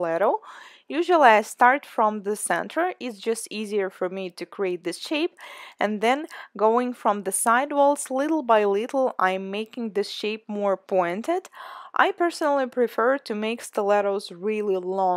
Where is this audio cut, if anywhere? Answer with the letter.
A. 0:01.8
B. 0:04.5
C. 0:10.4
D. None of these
C